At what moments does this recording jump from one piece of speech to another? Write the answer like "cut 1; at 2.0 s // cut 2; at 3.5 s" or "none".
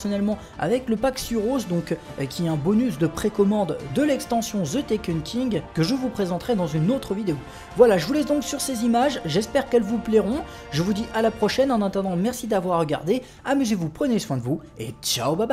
none